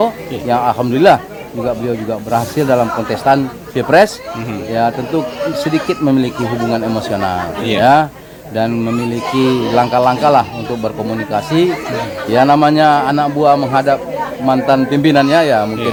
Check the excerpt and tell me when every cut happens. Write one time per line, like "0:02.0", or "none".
none